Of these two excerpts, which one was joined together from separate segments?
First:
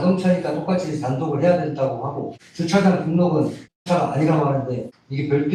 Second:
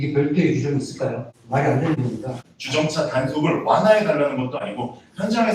second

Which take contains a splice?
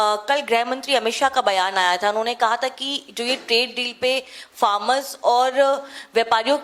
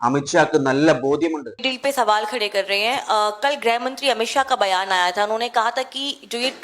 second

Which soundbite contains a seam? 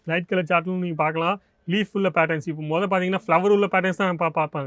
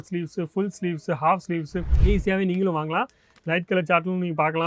second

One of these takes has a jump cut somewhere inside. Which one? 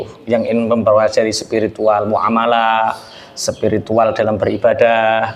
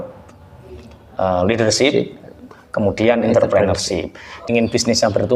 second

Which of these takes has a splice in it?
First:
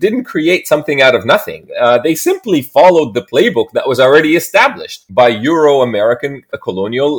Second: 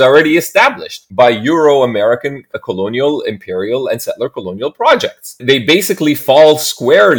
second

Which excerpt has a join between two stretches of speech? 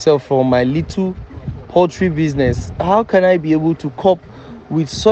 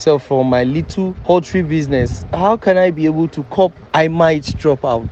second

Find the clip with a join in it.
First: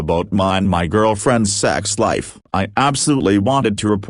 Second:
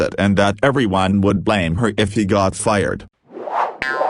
second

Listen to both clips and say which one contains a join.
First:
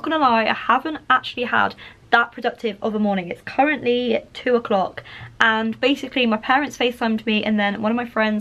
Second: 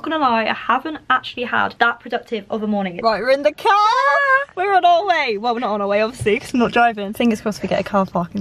second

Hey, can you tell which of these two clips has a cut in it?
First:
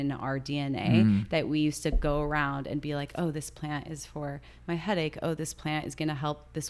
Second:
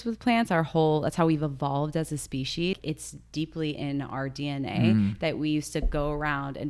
second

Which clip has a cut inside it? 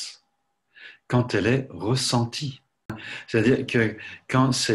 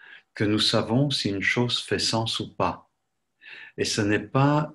first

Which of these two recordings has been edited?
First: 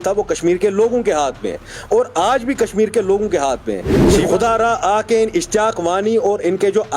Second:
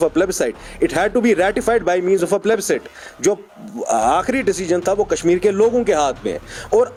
first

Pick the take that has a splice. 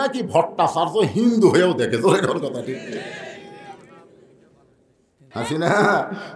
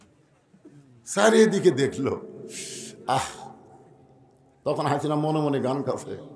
first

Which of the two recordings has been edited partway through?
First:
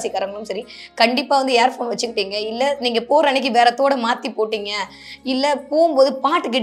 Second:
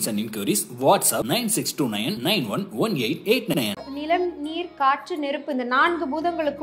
second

